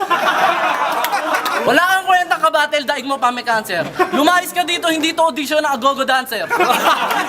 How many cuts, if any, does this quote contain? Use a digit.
1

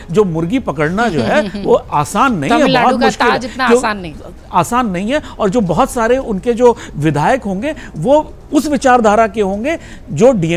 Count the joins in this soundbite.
0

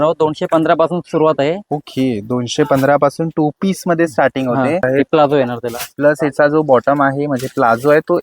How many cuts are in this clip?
1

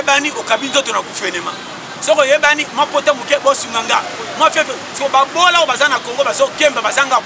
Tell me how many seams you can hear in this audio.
0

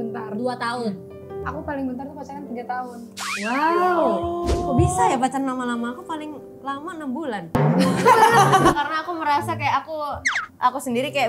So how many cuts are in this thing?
2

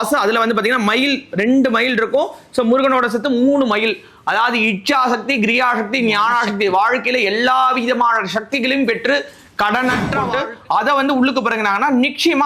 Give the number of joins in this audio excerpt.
1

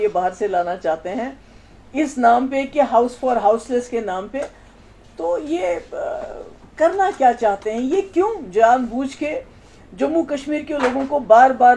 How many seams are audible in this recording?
0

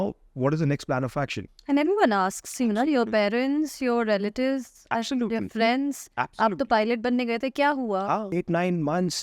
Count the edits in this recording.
2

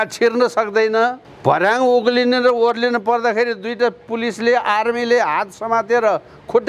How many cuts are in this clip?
1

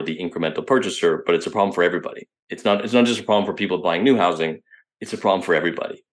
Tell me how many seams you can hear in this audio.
0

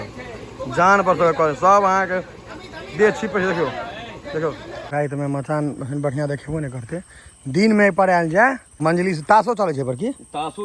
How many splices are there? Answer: 2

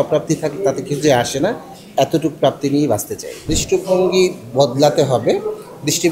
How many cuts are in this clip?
1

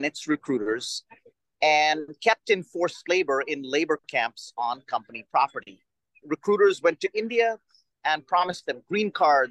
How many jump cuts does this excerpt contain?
2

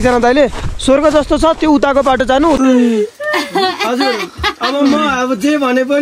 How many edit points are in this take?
1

